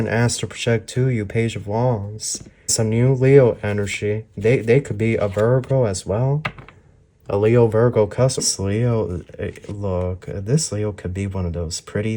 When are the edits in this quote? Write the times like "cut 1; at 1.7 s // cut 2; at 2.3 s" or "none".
cut 1; at 2.7 s // cut 2; at 8.4 s